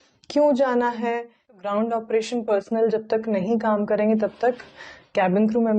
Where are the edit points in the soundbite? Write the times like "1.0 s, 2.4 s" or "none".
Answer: 1.6 s